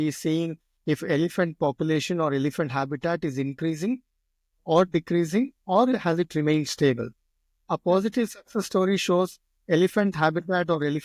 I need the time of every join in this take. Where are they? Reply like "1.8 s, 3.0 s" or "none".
none